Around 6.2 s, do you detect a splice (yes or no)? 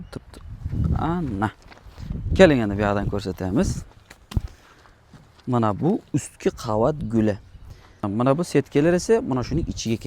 no